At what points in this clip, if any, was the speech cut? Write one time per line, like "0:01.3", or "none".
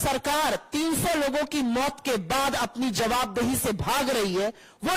none